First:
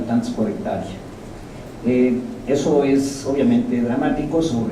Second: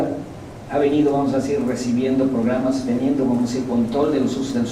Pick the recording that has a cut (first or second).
first